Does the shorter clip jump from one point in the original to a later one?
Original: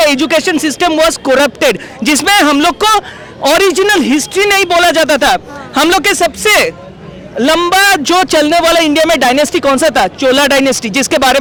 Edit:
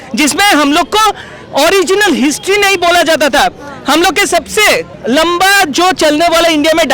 yes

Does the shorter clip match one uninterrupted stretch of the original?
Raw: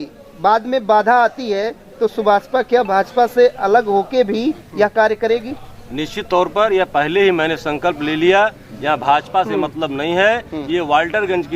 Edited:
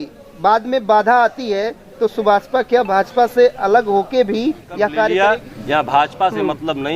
no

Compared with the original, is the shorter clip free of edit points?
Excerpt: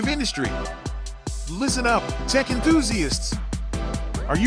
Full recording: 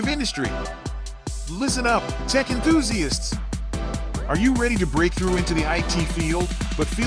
yes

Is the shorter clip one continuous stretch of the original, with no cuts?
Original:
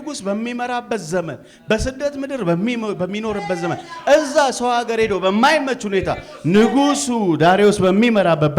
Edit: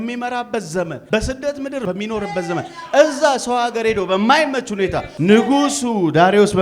no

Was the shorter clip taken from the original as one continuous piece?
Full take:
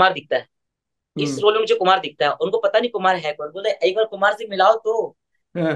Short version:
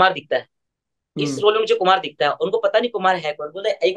yes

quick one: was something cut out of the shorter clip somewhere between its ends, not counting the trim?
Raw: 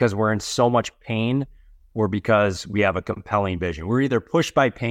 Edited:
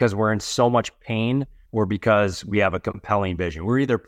yes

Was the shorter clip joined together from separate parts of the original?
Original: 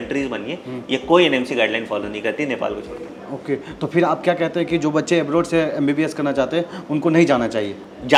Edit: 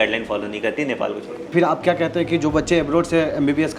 yes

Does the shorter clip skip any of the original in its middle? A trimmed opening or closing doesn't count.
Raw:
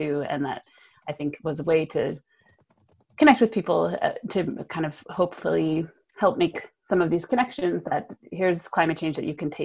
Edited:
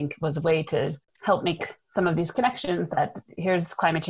yes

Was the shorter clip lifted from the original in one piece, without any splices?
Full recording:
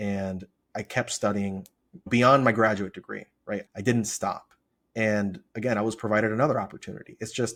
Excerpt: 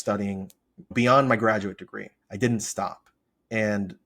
no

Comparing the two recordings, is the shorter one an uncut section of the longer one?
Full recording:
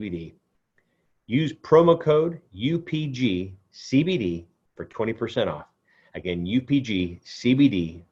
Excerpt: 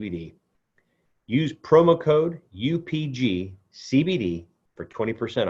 yes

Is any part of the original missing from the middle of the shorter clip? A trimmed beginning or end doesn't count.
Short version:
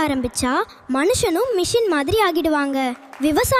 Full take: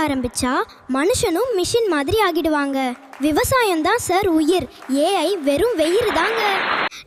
no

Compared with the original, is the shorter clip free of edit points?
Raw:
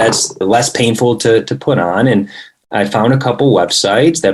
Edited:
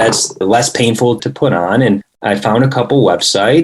no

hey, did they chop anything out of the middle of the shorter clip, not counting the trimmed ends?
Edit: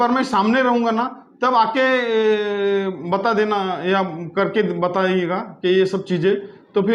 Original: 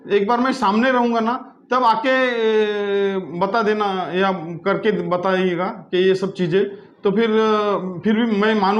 no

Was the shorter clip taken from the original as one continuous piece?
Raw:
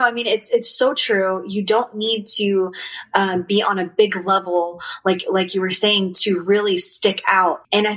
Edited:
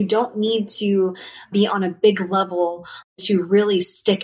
no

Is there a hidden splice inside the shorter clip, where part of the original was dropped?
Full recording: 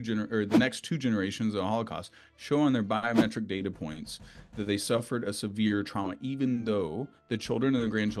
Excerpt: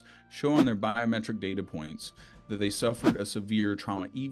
no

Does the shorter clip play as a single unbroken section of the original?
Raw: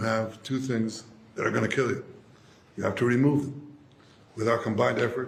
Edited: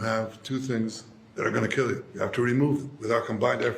no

